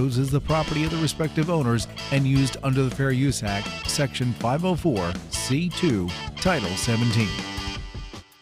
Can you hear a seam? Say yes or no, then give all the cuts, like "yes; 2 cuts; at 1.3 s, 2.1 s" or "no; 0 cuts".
yes; 1 cut; at 7.5 s